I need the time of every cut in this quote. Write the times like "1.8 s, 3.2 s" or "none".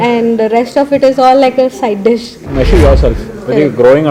2.4 s